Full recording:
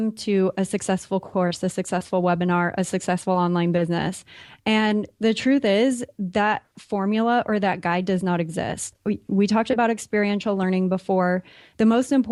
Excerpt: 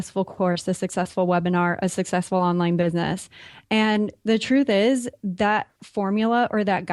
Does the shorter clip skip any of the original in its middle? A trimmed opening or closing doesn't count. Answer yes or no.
no